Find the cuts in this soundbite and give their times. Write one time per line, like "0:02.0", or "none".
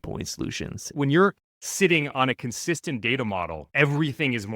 0:00.9
0:03.6